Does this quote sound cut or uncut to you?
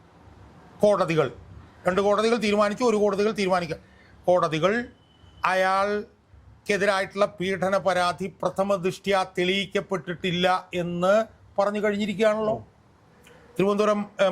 uncut